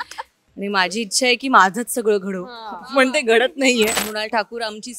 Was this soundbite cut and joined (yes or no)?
yes